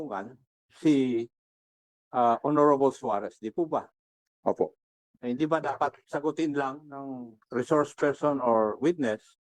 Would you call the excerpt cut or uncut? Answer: uncut